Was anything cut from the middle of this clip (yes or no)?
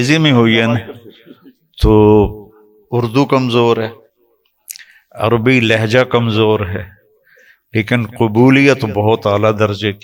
no